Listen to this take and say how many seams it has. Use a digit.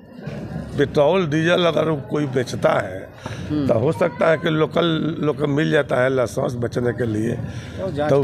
0